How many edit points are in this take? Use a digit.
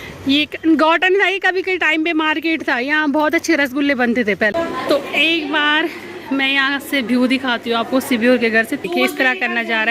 2